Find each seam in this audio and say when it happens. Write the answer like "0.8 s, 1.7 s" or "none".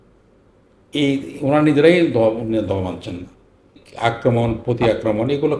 3.8 s